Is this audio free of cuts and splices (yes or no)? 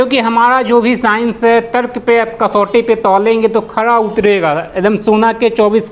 yes